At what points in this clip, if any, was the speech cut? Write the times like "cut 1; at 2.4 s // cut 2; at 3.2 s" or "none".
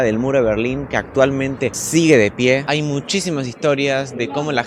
cut 1; at 1.8 s // cut 2; at 2.6 s